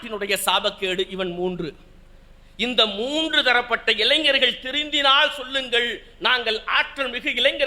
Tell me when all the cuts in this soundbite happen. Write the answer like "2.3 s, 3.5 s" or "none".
none